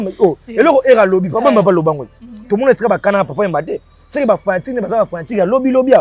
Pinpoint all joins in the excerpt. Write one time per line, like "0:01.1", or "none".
none